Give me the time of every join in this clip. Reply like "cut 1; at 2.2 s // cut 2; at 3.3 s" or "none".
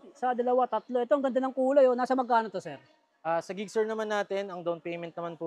none